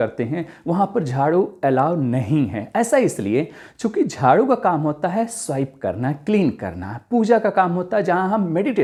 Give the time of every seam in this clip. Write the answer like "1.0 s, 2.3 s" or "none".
none